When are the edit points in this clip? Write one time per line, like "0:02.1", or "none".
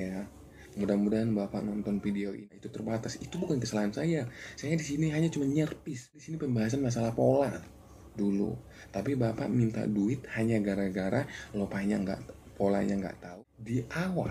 0:02.3
0:06.3
0:13.2